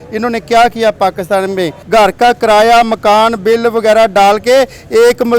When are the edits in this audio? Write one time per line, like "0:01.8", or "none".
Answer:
0:01.7